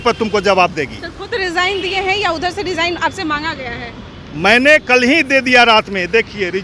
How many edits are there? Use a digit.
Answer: 0